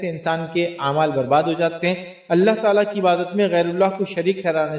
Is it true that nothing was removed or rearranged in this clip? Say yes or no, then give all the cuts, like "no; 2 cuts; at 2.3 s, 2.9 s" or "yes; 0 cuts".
no; 1 cut; at 1.8 s